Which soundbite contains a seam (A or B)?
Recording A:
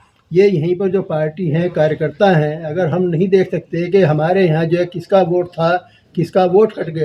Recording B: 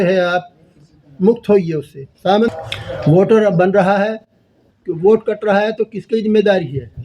B